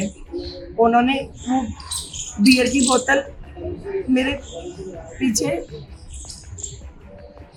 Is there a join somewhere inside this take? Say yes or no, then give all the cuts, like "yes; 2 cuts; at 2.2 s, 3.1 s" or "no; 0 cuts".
no; 0 cuts